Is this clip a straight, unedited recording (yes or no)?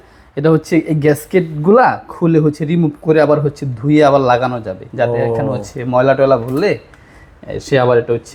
yes